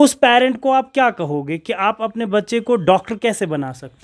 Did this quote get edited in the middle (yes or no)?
no